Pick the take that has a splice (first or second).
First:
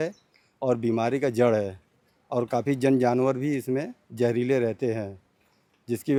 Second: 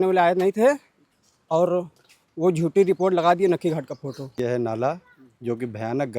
second